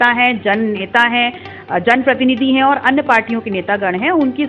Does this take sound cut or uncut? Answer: uncut